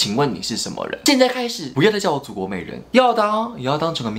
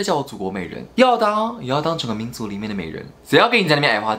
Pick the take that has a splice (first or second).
first